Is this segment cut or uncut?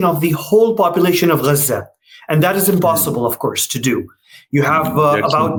uncut